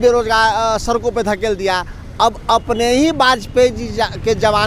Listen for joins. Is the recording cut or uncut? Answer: uncut